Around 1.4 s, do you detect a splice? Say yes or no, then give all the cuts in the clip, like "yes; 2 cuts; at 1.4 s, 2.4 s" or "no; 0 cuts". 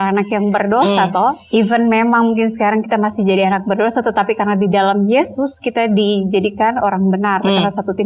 yes; 1 cut; at 1.4 s